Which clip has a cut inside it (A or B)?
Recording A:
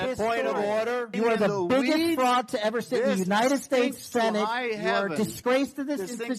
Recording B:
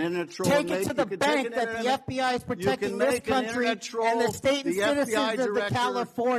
A